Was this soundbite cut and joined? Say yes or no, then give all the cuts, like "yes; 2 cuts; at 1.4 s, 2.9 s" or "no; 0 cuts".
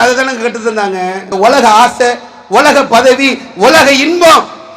yes; 1 cut; at 1.2 s